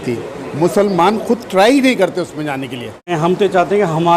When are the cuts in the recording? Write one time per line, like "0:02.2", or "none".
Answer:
0:03.1